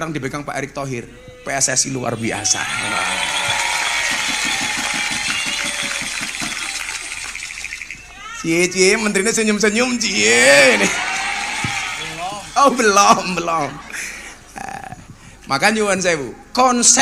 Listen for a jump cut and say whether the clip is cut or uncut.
uncut